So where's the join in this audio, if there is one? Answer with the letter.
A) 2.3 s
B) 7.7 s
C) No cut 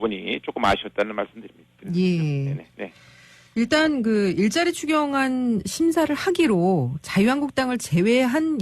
A